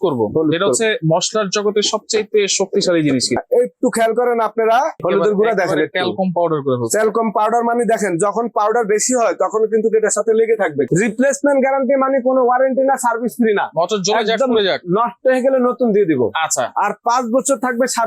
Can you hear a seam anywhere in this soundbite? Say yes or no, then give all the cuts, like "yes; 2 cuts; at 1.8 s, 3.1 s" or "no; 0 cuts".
yes; 3 cuts; at 3.3 s, 5.0 s, 10.9 s